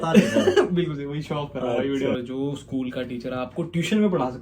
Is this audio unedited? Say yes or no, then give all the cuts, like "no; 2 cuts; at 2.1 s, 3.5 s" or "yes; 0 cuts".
no; 1 cut; at 2.2 s